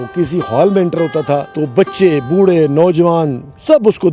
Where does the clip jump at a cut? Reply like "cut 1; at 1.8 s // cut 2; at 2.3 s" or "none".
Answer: cut 1; at 1.5 s